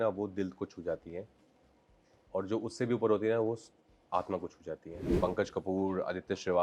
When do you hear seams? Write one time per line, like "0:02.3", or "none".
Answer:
0:05.2